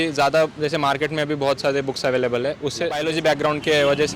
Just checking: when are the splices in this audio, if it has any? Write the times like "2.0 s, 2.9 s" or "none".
3.0 s